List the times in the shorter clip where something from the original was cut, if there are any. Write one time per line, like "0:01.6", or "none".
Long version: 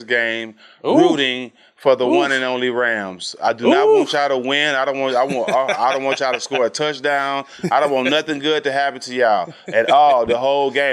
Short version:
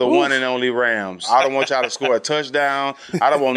0:01.2